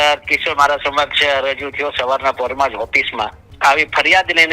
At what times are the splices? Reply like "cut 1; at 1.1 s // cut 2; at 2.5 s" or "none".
cut 1; at 3.4 s

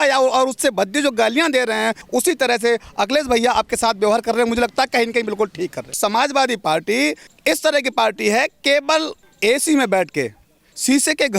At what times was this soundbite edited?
cut 1; at 2.0 s // cut 2; at 6.0 s // cut 3; at 7.3 s // cut 4; at 9.2 s

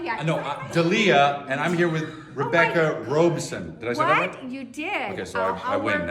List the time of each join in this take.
none

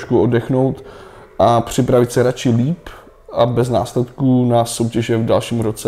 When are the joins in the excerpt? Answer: none

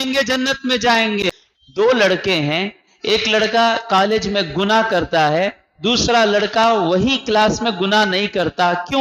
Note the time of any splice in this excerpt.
cut 1; at 1.4 s

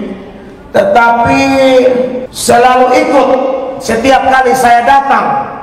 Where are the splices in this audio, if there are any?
cut 1; at 2.3 s

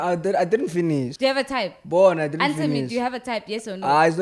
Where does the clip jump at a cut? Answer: cut 1; at 1.1 s

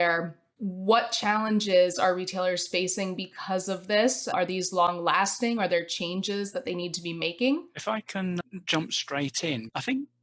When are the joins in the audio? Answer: cut 1; at 4.3 s

